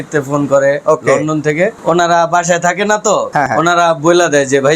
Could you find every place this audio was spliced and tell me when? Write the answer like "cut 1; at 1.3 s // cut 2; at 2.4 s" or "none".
cut 1; at 1.8 s // cut 2; at 3.5 s